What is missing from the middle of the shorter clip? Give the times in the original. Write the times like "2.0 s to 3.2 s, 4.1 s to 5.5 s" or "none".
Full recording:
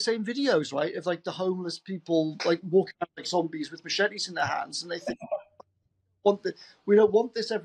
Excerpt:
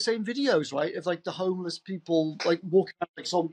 none